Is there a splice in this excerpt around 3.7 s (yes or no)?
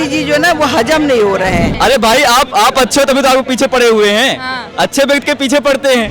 no